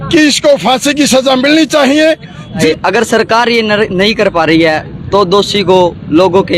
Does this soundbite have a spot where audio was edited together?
yes; 1 cut; at 2.6 s

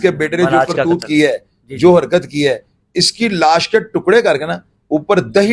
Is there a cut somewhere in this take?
no; 0 cuts

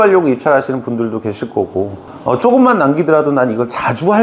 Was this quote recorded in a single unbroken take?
no; 1 cut; at 2.0 s

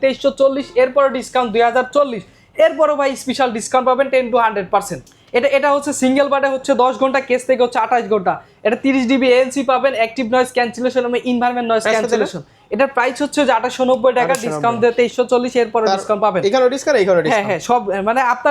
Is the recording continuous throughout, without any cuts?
yes; 0 cuts

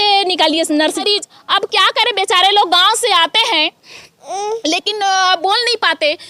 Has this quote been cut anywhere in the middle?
yes; 1 cut; at 1.0 s

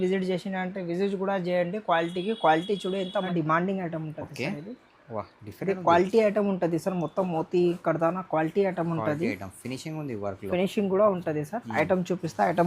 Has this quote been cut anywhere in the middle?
yes; 1 cut; at 3.3 s

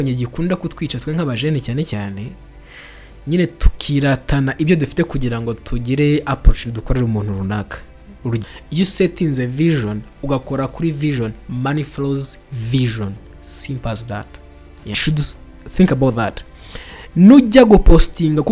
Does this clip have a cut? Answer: yes; 2 cuts; at 8.4 s, 15.0 s

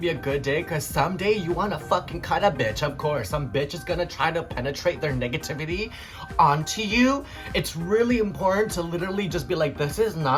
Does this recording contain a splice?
no; 0 cuts

